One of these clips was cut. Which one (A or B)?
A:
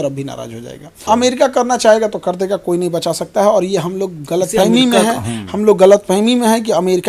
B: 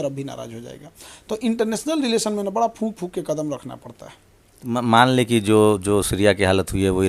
A